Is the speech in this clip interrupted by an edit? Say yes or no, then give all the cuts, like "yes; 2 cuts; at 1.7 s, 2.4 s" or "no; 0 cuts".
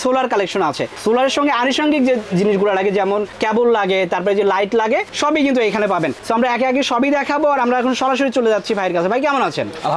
no; 0 cuts